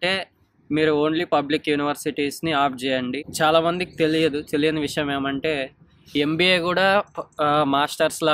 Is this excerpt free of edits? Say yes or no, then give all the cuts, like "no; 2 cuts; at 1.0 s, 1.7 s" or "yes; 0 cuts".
no; 1 cut; at 3.3 s